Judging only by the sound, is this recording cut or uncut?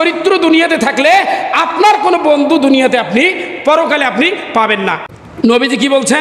cut